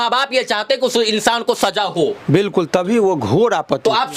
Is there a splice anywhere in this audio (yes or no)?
no